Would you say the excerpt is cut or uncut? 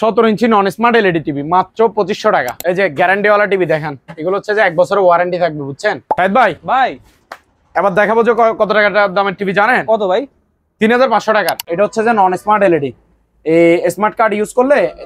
cut